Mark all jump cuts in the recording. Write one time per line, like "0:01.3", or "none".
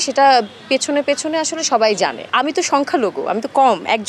0:02.2

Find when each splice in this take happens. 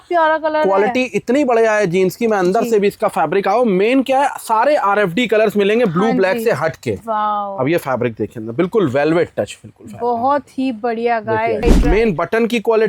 0:11.6

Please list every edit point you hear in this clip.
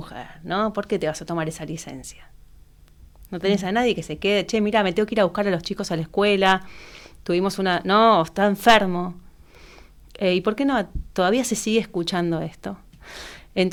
none

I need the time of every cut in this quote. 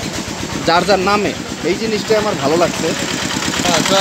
none

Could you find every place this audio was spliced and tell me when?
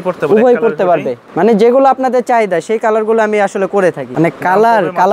0:01.2
0:04.0

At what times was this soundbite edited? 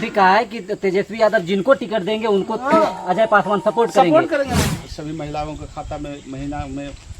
0:04.5

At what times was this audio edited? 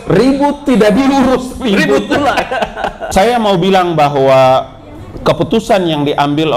0:03.0

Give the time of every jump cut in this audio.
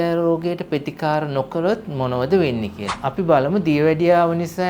0:02.8

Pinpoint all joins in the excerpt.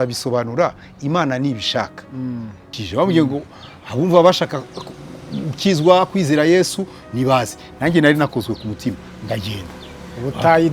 0:02.8

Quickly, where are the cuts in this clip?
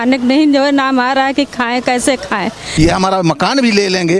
0:02.6

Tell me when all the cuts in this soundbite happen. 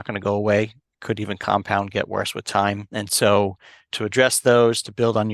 0:02.9
0:03.9

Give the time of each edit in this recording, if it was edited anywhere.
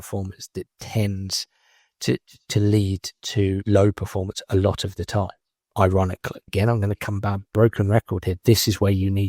0:06.3

